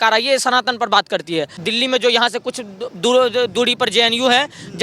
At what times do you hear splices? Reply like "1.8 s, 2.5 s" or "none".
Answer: 1.6 s